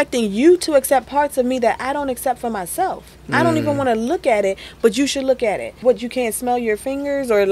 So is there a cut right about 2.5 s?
no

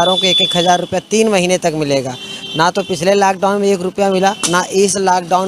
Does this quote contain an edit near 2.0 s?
no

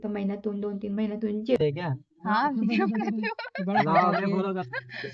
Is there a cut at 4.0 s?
no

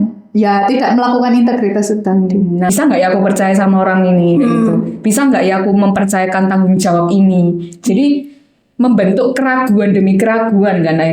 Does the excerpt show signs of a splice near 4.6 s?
no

